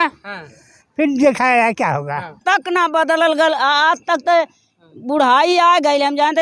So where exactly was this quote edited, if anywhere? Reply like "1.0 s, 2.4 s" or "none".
2.4 s